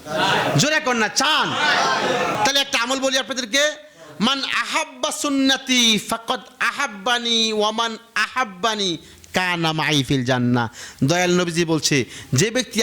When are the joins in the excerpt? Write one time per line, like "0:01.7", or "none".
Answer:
0:02.3